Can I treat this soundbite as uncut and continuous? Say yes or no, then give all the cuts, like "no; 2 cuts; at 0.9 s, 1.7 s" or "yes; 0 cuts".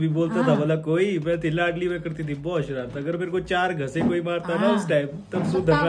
yes; 0 cuts